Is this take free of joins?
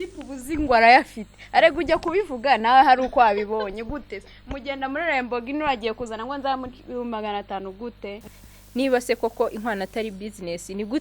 no; 1 cut; at 8.3 s

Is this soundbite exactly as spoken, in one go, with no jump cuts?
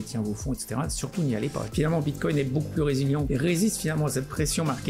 no; 2 cuts; at 1.7 s, 3.3 s

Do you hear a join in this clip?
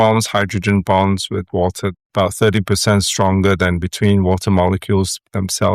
yes; 1 cut; at 2.0 s

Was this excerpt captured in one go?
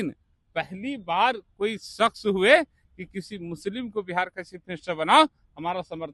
yes; 0 cuts

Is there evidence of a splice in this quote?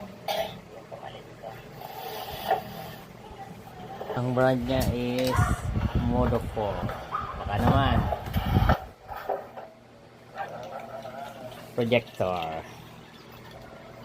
no; 0 cuts

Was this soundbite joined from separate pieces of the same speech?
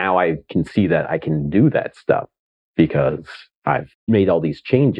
yes; 1 cut; at 4.0 s

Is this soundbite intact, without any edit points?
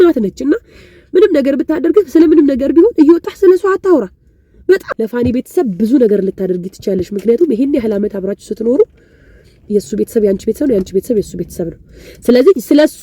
no; 1 cut; at 4.8 s

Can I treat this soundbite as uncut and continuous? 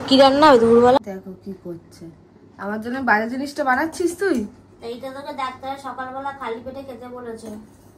no; 1 cut; at 1.0 s

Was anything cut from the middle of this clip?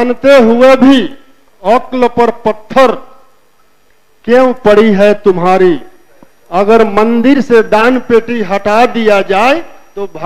no; 0 cuts

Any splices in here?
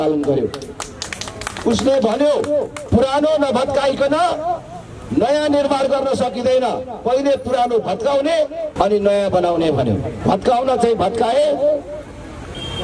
yes; 3 cuts; at 2.8 s, 8.7 s, 10.1 s

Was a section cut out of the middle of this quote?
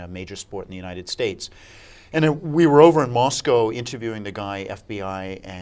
no; 0 cuts

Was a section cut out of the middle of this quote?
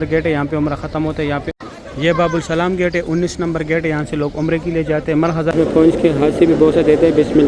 yes; 2 cuts; at 1.5 s, 5.5 s

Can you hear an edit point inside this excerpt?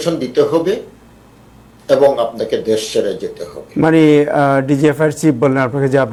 no; 0 cuts

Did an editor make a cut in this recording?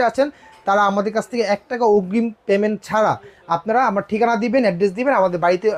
no; 0 cuts

